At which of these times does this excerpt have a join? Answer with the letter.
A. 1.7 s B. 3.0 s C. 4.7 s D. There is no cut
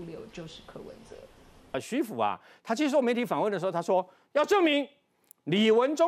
A